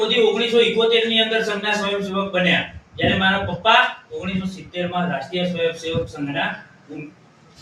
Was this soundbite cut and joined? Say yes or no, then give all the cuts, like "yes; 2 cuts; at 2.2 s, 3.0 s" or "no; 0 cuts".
no; 0 cuts